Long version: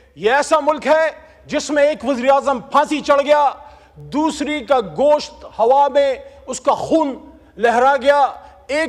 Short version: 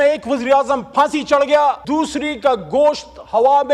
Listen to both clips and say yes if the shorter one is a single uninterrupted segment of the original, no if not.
no